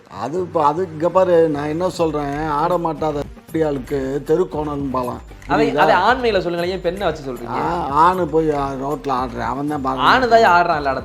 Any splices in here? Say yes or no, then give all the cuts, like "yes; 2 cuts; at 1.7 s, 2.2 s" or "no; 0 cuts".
yes; 1 cut; at 5.3 s